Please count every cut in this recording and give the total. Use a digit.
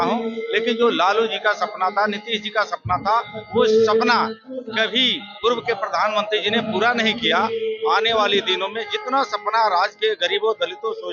0